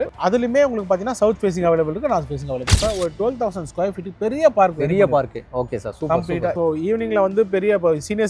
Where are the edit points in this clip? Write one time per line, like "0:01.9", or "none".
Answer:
0:02.8